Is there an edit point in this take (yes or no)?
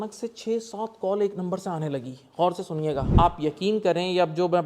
yes